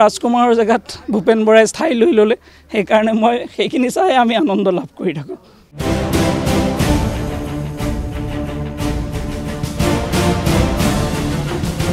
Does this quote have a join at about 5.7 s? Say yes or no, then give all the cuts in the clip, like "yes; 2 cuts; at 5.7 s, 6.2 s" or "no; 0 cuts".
yes; 1 cut; at 5.7 s